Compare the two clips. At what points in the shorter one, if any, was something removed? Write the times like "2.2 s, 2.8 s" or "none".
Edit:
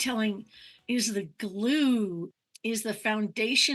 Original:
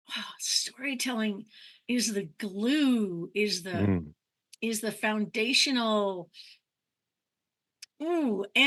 2.2 s